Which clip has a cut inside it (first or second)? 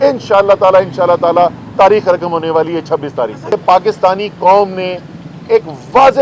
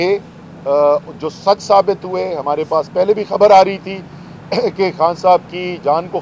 first